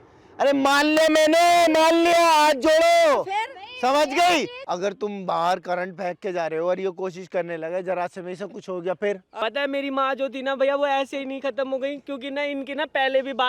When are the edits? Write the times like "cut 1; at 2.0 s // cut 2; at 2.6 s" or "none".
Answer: cut 1; at 4.6 s // cut 2; at 9.4 s